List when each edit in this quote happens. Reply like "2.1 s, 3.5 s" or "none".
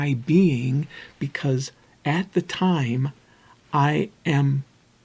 none

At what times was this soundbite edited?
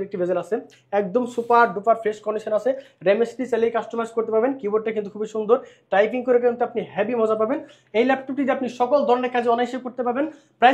none

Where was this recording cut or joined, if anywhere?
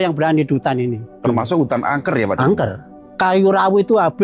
3.0 s

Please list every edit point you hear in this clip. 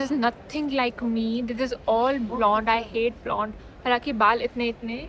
none

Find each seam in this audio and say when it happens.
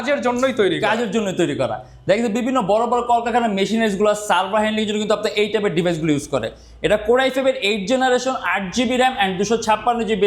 none

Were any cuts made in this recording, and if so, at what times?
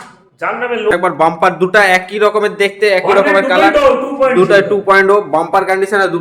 0.9 s

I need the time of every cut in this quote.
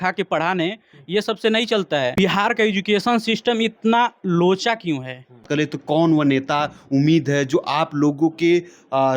2.1 s, 5.5 s

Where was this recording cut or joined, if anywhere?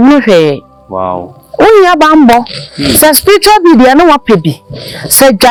none

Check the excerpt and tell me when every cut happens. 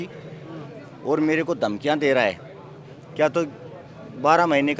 none

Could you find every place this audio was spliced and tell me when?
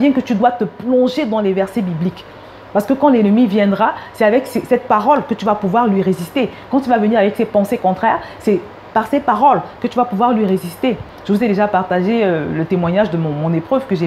none

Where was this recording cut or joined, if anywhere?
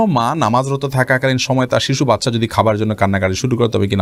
none

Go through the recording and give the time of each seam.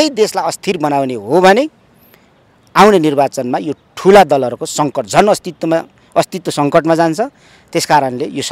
none

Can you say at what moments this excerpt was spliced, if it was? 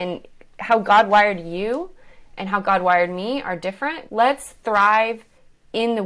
4.0 s

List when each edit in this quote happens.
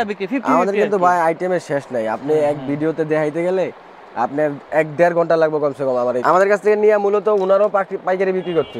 6.2 s

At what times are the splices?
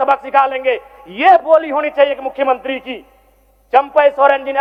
none

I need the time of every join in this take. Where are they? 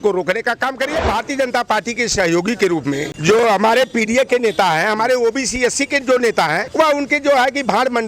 1.1 s, 3.1 s, 6.6 s

